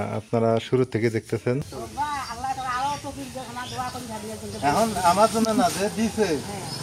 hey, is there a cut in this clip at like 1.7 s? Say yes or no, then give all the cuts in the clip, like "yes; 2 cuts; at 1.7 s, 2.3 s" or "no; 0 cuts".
yes; 1 cut; at 1.7 s